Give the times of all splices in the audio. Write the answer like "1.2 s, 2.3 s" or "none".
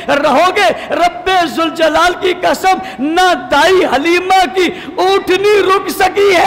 none